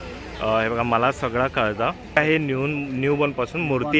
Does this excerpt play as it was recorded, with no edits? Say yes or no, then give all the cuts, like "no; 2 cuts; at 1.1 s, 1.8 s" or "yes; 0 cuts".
no; 1 cut; at 2.2 s